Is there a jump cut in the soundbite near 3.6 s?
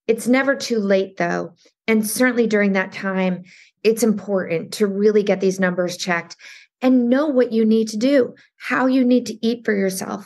yes; 1 cut; at 3.6 s

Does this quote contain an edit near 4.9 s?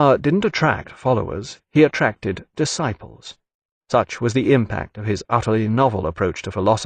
yes; 1 cut; at 4.9 s

